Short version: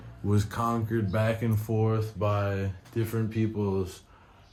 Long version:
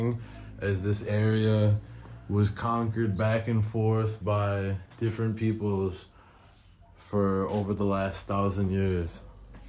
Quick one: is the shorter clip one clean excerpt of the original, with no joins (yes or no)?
yes